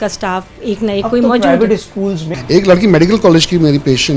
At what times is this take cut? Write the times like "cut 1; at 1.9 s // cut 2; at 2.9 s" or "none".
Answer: cut 1; at 2.3 s